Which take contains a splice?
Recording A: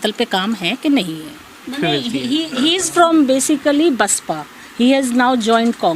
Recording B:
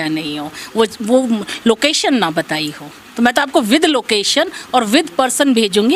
A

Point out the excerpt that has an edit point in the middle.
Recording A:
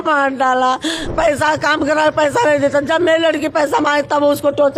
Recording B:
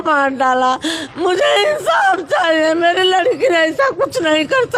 A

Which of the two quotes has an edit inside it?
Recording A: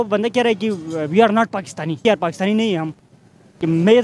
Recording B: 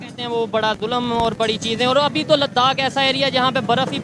A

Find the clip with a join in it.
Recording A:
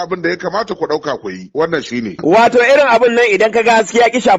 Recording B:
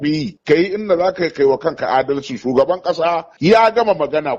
A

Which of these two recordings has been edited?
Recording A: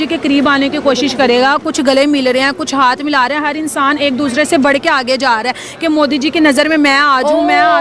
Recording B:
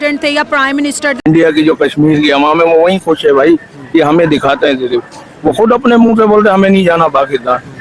B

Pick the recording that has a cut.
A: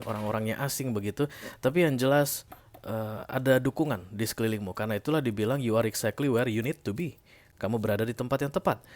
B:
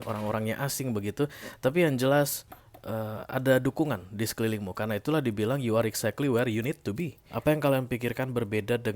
B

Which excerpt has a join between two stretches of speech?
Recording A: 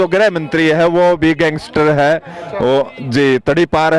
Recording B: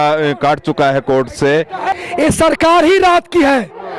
B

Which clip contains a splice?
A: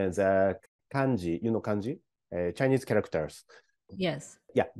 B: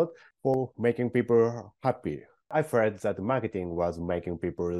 B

